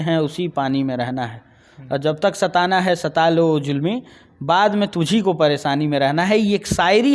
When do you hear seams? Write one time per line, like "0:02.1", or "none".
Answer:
none